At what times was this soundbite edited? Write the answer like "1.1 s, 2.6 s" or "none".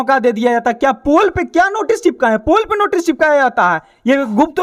none